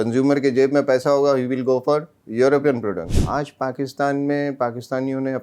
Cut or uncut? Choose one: cut